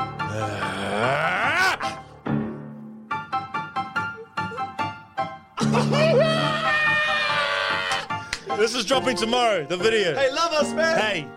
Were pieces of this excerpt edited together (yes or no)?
no